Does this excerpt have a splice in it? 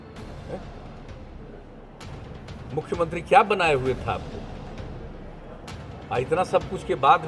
no; 0 cuts

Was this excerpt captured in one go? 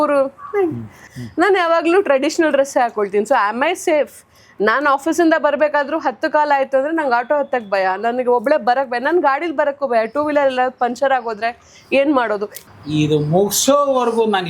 no; 2 cuts; at 1.1 s, 12.6 s

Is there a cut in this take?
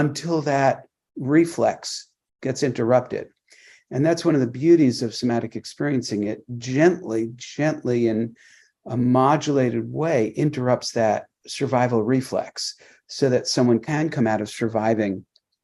yes; 1 cut; at 13.9 s

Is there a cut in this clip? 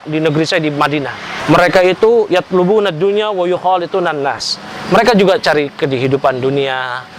yes; 1 cut; at 1.3 s

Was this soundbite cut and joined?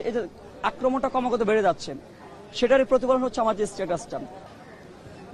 yes; 1 cut; at 4.4 s

